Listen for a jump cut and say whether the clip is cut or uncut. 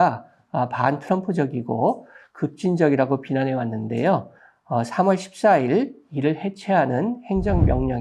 uncut